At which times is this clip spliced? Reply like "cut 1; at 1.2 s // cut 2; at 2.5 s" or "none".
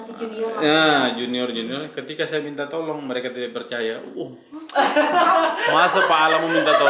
none